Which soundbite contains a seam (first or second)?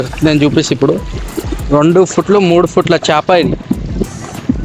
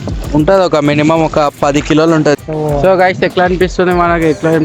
second